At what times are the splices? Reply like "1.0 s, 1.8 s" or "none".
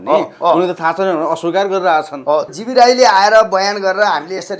2.5 s

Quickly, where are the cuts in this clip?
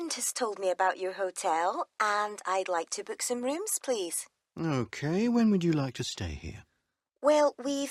none

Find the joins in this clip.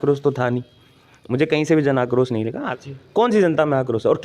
2.6 s

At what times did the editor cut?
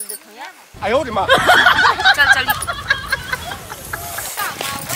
none

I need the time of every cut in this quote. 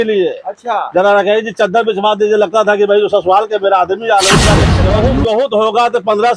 4.8 s

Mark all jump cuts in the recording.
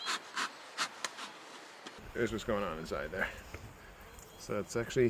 2.0 s

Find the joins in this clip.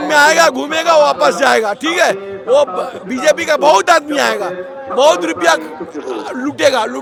none

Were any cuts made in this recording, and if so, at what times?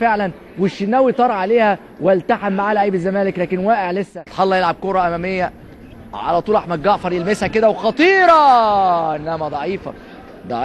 5.8 s

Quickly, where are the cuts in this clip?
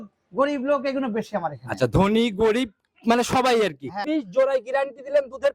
4.1 s

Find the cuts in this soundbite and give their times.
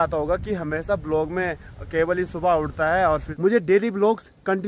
3.3 s

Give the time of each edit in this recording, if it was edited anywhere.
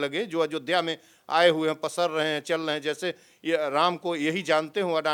none

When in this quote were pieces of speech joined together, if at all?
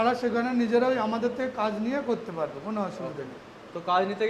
none

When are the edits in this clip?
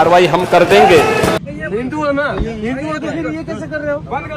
1.4 s

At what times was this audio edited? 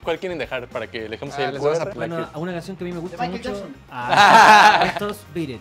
1.9 s

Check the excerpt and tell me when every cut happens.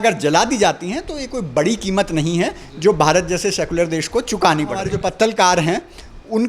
4.9 s

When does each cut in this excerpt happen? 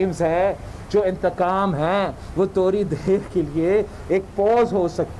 none

